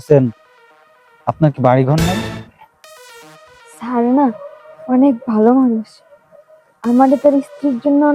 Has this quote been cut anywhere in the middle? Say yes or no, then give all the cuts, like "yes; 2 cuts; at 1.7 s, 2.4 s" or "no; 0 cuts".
yes; 1 cut; at 2.2 s